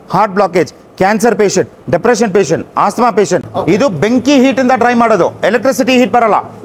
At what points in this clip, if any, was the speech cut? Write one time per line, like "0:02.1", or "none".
0:03.5